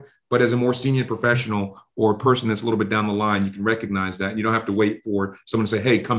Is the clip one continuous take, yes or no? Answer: yes